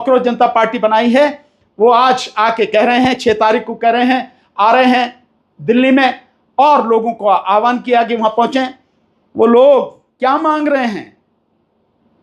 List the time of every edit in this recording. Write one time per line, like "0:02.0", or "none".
0:01.0